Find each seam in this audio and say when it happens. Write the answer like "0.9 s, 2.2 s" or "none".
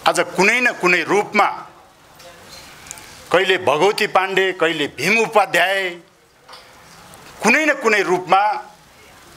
none